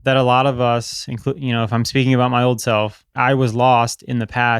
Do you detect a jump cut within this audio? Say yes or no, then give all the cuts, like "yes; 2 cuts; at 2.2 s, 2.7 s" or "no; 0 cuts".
yes; 1 cut; at 3.1 s